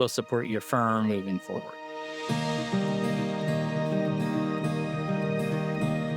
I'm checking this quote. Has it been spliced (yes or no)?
yes